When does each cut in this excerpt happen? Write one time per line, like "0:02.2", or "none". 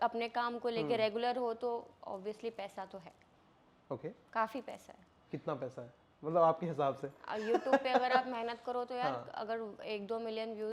none